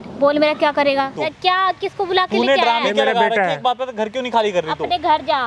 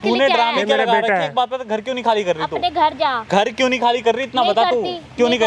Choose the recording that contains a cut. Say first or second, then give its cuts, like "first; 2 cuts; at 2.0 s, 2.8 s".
first; 1 cut; at 1.2 s